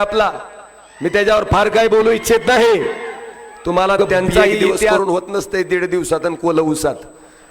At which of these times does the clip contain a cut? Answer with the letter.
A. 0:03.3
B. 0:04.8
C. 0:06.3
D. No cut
B